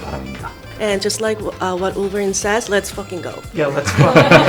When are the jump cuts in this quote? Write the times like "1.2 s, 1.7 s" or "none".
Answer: none